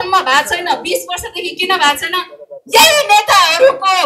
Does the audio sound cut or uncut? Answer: uncut